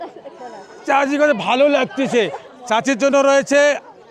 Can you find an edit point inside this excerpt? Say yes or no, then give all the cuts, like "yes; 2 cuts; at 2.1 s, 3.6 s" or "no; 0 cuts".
yes; 1 cut; at 2.4 s